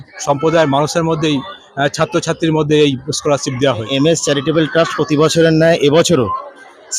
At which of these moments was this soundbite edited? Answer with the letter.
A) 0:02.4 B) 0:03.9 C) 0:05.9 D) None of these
B